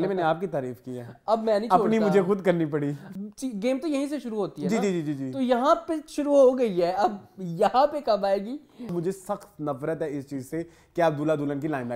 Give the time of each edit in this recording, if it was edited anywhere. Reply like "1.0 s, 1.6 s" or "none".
3.0 s, 8.9 s